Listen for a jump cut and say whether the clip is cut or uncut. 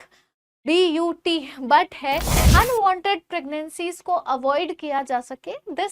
cut